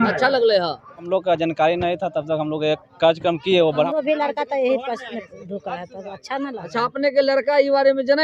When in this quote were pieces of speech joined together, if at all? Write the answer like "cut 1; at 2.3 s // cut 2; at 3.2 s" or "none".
cut 1; at 1.1 s // cut 2; at 3.9 s